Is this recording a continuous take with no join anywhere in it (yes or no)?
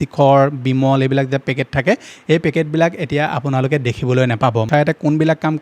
no